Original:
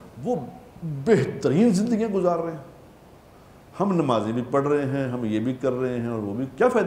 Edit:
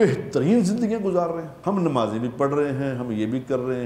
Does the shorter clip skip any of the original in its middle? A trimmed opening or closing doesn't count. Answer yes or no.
yes